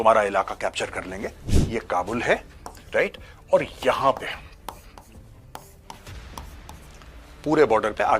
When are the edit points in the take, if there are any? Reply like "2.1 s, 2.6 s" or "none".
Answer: 1.5 s